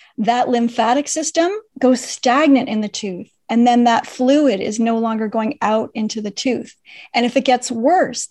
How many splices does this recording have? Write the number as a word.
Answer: one